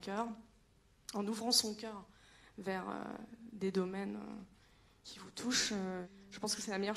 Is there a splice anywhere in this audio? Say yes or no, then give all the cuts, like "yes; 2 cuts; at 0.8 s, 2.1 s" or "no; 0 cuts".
yes; 1 cut; at 6.0 s